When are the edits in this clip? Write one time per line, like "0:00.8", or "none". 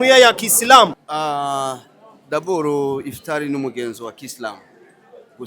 0:01.1